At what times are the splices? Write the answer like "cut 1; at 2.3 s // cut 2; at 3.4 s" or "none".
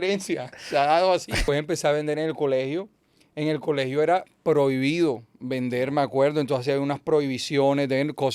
cut 1; at 1.4 s